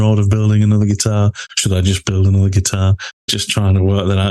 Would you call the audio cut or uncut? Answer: cut